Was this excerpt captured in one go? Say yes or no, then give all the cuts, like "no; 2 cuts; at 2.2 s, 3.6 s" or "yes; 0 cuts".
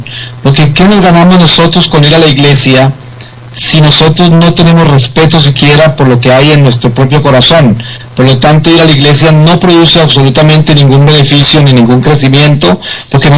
yes; 0 cuts